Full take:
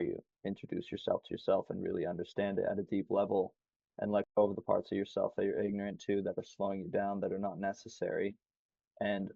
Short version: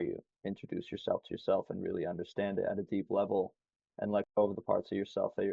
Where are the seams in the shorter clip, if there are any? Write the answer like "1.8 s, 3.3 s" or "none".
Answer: none